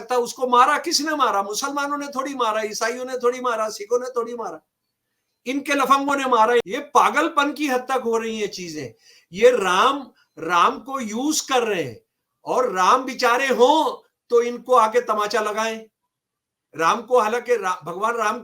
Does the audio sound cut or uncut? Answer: cut